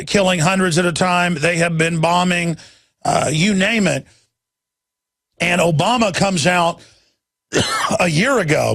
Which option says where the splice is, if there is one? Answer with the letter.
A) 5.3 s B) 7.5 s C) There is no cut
C